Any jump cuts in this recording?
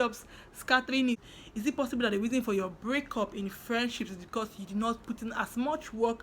yes; 1 cut; at 1.2 s

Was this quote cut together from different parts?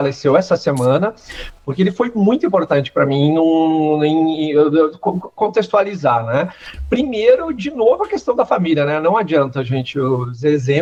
no; 0 cuts

